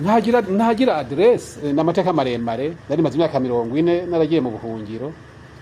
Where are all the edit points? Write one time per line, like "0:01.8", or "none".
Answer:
0:01.7
0:02.8